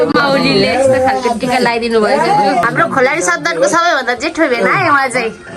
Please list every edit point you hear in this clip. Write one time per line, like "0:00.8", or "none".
0:02.7